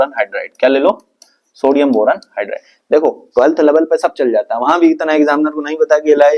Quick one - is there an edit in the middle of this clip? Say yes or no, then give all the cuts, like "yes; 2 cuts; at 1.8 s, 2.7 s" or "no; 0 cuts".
no; 0 cuts